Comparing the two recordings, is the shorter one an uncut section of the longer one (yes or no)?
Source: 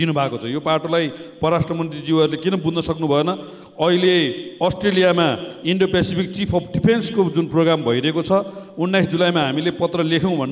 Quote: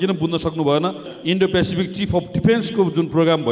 no